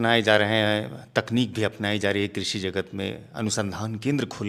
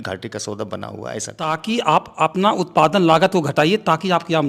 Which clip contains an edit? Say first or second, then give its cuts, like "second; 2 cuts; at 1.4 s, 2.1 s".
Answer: second; 1 cut; at 1.5 s